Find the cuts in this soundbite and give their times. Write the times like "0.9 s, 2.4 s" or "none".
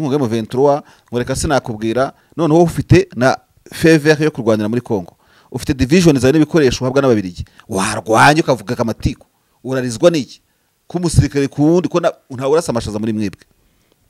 2.2 s